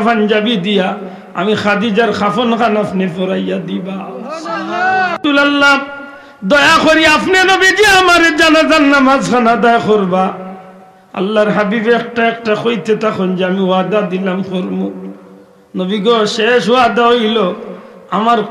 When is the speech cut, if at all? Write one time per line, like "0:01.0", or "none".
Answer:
none